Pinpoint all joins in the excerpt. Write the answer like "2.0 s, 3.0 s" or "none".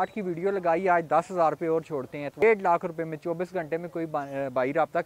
2.3 s